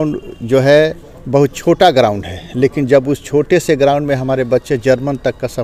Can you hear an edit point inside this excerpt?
no; 0 cuts

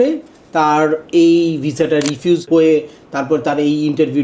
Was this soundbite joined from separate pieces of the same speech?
yes; 1 cut; at 2.4 s

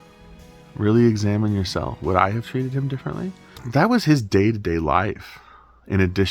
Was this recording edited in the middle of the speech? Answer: yes; 1 cut; at 3.6 s

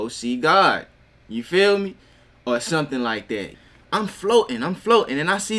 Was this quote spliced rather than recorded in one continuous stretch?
yes; 1 cut; at 3.5 s

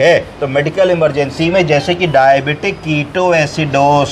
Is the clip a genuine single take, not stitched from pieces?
yes; 0 cuts

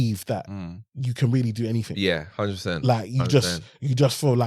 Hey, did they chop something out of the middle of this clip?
no; 0 cuts

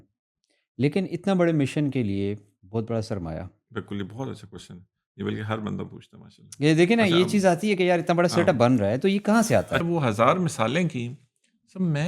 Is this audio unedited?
no; 1 cut; at 9.8 s

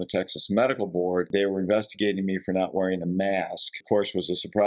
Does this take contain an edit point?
yes; 2 cuts; at 1.3 s, 3.8 s

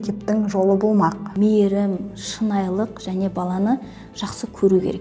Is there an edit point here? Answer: yes; 1 cut; at 1.2 s

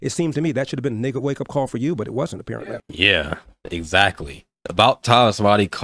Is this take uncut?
no; 1 cut; at 2.4 s

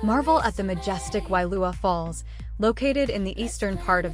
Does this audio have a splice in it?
no; 0 cuts

